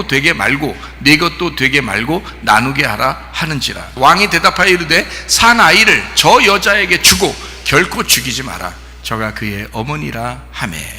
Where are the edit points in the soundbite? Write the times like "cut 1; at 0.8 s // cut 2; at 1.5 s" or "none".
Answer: cut 1; at 3.8 s